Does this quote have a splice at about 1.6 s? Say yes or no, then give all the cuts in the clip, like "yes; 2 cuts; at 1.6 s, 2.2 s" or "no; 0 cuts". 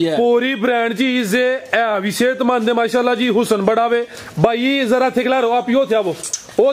no; 0 cuts